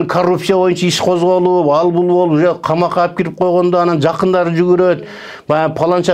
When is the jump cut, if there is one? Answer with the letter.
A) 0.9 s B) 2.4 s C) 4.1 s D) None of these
D